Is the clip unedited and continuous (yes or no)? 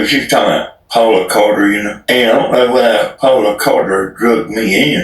no